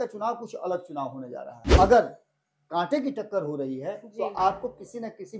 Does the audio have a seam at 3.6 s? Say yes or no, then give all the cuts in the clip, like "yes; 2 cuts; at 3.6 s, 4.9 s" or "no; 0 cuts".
no; 1 cut; at 1.5 s